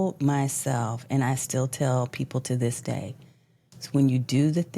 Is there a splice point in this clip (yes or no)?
no